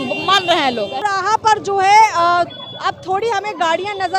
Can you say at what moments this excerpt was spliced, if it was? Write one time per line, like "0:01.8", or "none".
0:01.0